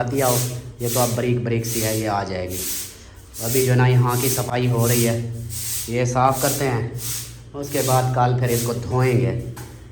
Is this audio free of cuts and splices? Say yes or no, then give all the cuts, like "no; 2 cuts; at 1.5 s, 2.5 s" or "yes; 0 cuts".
yes; 0 cuts